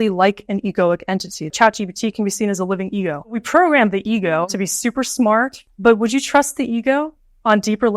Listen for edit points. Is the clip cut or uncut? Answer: cut